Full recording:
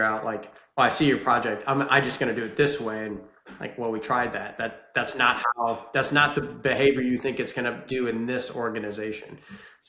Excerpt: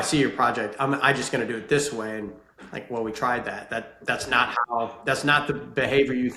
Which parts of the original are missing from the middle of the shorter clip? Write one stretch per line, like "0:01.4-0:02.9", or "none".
none